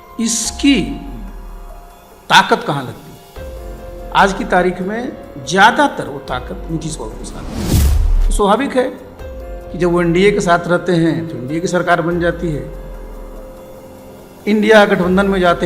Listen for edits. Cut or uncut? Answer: uncut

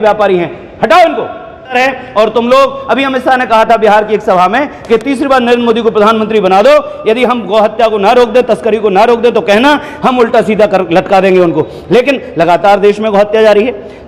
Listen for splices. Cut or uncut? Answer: cut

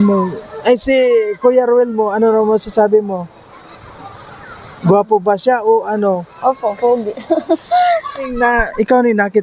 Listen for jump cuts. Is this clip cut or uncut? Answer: cut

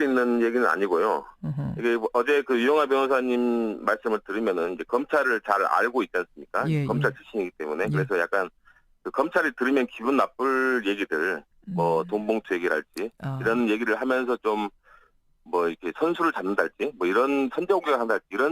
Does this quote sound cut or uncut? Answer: uncut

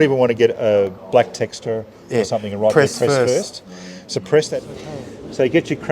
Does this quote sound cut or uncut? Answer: cut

